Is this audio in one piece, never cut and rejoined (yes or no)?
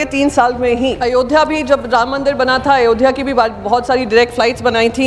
no